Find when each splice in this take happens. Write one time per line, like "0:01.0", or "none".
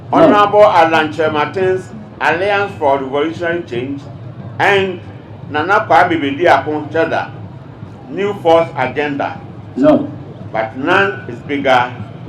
none